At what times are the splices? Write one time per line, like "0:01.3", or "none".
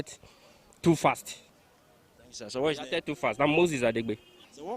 none